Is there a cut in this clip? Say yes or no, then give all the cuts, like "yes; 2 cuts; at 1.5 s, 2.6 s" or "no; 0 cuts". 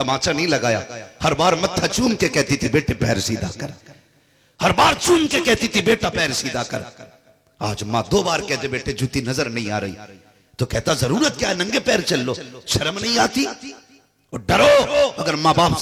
no; 0 cuts